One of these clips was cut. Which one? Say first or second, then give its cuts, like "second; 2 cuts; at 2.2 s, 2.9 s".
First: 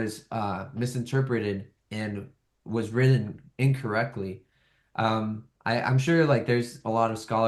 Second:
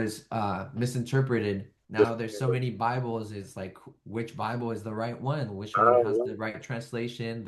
second; 1 cut; at 1.8 s